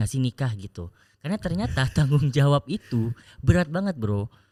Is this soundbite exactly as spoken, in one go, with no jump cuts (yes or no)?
yes